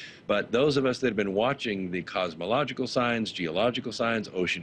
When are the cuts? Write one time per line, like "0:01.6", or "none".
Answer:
none